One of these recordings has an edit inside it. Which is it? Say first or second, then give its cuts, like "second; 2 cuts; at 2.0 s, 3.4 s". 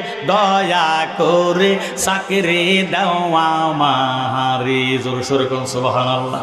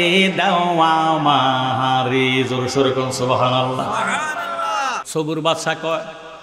second; 1 cut; at 5.0 s